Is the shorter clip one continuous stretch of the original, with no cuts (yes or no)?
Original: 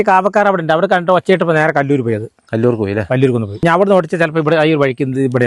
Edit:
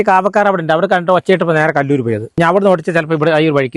no